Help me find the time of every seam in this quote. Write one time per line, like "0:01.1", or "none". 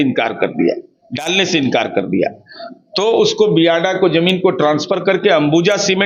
none